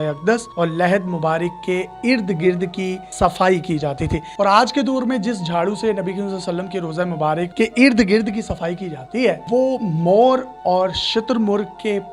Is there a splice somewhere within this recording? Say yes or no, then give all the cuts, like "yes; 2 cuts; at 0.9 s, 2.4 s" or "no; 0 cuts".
yes; 3 cuts; at 4.3 s, 7.5 s, 9.4 s